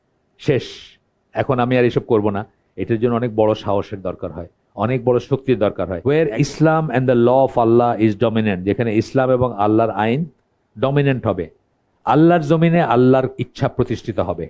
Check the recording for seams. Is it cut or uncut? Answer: cut